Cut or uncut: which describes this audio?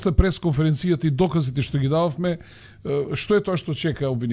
uncut